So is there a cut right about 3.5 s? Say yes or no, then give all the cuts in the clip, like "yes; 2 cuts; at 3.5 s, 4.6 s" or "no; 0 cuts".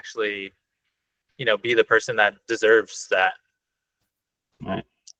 no; 0 cuts